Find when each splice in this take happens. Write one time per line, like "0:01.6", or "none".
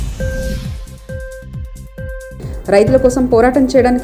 0:02.3